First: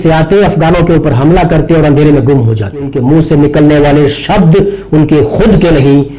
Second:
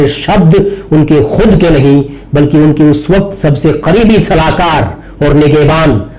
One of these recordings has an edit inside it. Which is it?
first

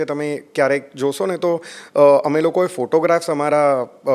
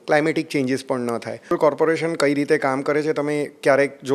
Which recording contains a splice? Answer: second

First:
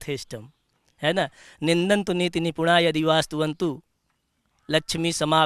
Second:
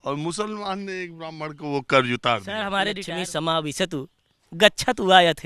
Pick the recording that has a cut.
second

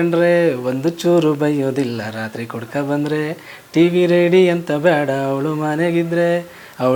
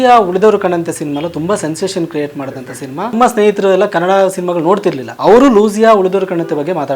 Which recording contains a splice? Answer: second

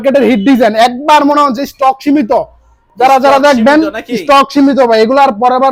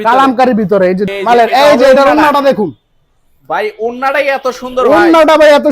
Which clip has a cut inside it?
second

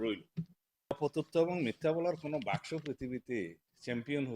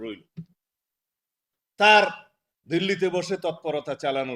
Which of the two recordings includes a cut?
first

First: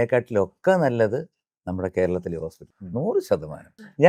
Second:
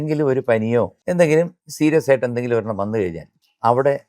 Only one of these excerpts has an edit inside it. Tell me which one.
second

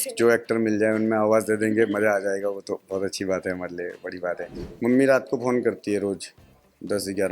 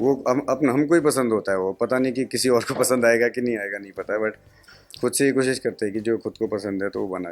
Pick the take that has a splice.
first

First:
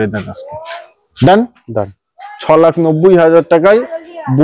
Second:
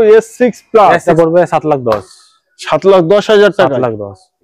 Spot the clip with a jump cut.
second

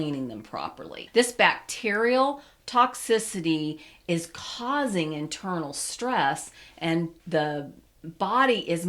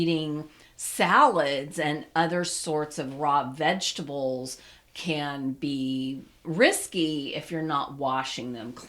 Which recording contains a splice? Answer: first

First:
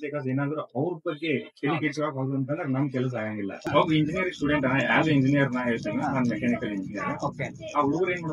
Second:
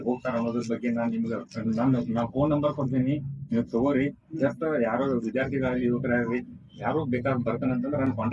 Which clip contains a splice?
first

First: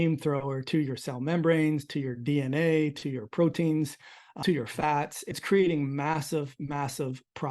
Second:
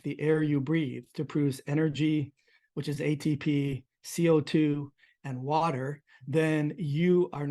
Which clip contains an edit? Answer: first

